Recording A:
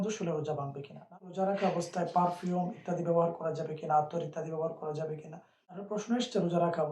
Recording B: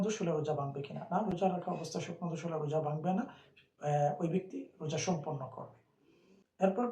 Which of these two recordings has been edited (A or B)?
A